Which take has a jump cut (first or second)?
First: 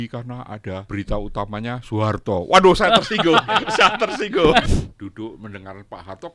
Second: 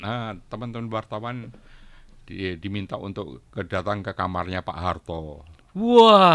first